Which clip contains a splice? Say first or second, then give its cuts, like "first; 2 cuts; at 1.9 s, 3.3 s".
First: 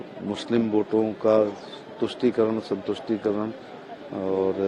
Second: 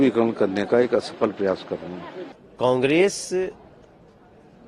second; 1 cut; at 1.9 s